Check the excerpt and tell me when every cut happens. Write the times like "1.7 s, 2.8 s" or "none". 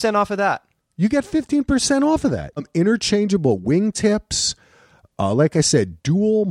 2.6 s